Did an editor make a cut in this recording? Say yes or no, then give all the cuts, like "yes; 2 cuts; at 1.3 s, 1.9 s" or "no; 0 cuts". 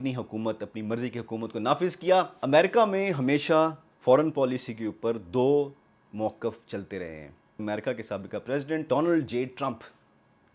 yes; 3 cuts; at 2.3 s, 7.6 s, 8.9 s